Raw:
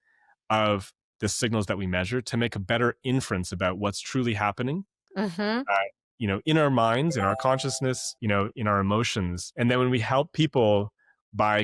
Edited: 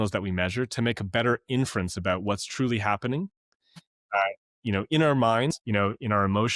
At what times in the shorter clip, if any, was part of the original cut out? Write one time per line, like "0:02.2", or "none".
0:05.5